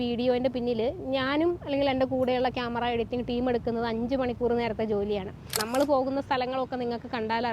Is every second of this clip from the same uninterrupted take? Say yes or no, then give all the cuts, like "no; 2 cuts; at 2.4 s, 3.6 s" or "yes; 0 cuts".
no; 1 cut; at 5.6 s